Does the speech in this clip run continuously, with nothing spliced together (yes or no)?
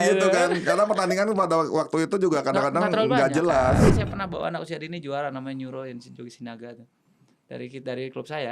no